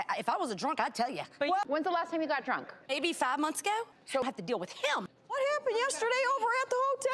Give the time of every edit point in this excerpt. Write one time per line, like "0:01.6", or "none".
0:01.6
0:04.2